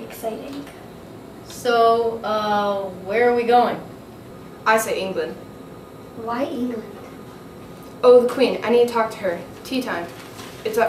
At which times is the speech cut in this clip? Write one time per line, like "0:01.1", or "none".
0:01.0